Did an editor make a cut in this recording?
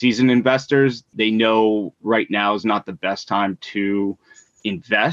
yes; 1 cut; at 1.1 s

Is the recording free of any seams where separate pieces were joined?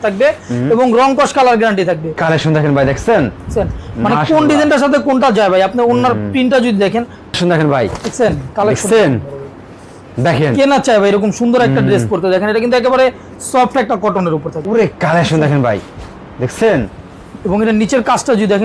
no; 3 cuts; at 2.2 s, 7.4 s, 14.5 s

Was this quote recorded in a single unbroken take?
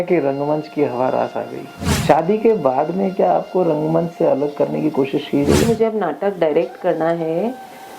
no; 2 cuts; at 2.0 s, 5.6 s

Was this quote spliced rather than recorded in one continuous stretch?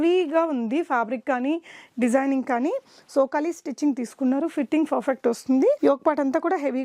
no; 0 cuts

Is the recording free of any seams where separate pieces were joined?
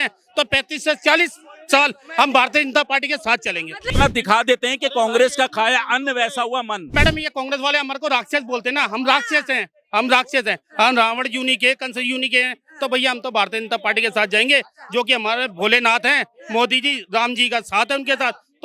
no; 2 cuts; at 3.9 s, 6.9 s

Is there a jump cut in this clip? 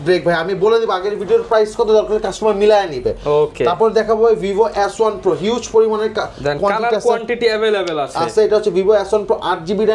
no; 0 cuts

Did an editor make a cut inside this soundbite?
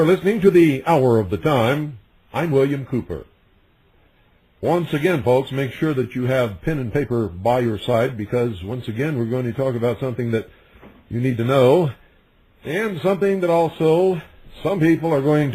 no; 0 cuts

